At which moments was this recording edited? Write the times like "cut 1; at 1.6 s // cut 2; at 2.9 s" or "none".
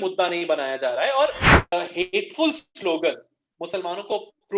cut 1; at 1.5 s